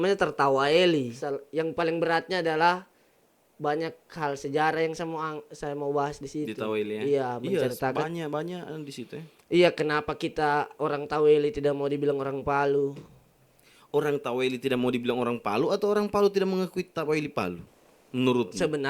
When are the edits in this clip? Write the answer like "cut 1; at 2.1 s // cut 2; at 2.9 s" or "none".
cut 1; at 1.1 s